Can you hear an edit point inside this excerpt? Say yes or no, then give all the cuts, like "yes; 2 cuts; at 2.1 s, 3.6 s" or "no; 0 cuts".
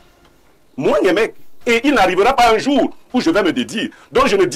no; 0 cuts